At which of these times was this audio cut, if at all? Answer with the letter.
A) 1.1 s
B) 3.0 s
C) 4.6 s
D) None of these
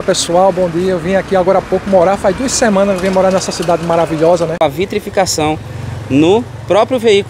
C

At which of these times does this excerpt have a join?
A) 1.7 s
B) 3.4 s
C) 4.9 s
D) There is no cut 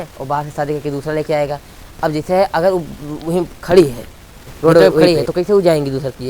C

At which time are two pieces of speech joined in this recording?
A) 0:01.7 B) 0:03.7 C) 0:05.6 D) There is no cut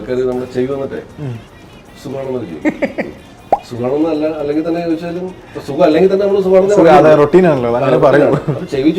D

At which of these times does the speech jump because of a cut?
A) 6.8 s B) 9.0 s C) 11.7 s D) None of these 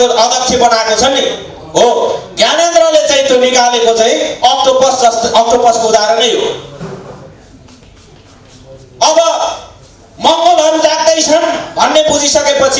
D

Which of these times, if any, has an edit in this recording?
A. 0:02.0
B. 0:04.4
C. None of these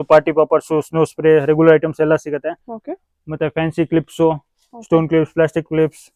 C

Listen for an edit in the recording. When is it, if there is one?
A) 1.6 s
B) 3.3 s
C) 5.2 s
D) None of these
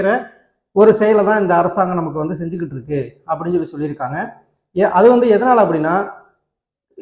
D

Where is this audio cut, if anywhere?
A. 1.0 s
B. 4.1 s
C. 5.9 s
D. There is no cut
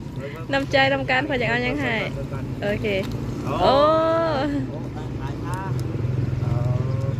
D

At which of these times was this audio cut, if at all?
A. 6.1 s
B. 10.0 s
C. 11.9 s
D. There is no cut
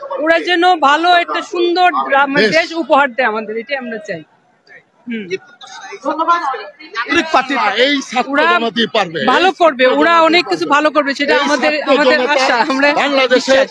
D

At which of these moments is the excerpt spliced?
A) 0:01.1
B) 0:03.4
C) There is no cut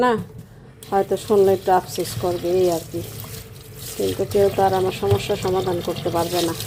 C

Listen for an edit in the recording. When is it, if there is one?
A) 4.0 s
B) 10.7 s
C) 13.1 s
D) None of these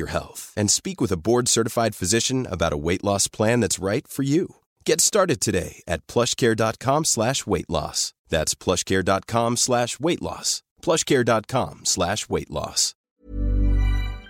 C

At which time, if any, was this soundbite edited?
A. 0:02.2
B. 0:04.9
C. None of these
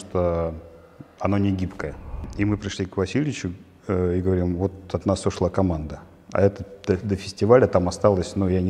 A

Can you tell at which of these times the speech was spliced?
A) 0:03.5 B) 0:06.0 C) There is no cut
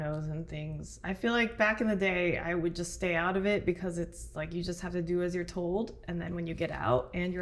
C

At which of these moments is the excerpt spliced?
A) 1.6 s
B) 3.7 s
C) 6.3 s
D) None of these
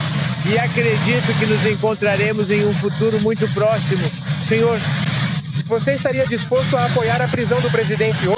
D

